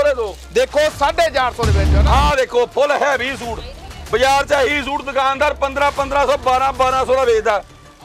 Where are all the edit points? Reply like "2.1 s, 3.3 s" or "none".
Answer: none